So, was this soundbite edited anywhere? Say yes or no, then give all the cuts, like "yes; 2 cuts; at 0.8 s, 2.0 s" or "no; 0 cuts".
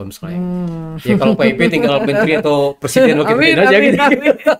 no; 0 cuts